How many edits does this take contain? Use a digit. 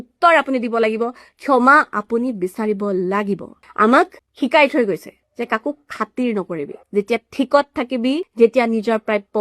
5